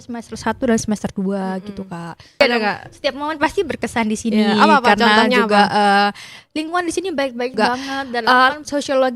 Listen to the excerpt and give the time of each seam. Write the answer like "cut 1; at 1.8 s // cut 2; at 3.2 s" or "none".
cut 1; at 2.4 s // cut 2; at 8.2 s